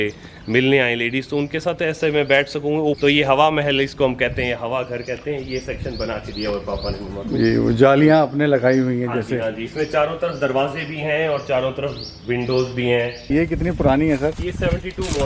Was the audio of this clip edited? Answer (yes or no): yes